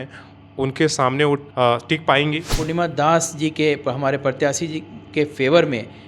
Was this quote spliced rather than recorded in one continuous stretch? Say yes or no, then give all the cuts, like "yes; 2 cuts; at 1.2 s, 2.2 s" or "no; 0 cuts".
yes; 2 cuts; at 1.5 s, 2.6 s